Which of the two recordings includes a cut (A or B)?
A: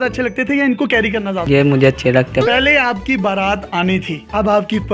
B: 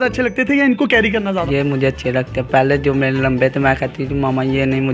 A